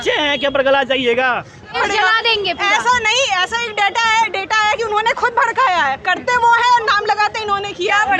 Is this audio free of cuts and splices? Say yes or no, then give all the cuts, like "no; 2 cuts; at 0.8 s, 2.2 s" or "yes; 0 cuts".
no; 1 cut; at 1.7 s